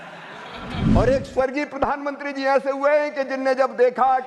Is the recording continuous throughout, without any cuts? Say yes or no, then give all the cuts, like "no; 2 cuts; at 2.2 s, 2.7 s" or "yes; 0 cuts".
no; 1 cut; at 0.9 s